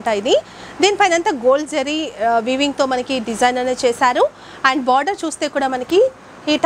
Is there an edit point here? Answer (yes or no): no